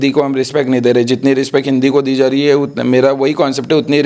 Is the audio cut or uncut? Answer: uncut